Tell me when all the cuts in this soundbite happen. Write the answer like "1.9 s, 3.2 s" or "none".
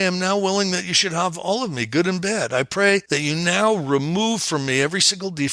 3.1 s